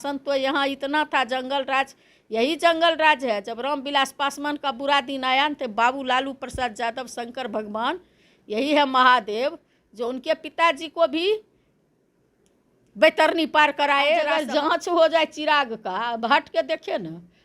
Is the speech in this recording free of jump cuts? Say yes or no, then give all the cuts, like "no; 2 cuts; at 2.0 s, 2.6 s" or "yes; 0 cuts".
no; 1 cut; at 14.3 s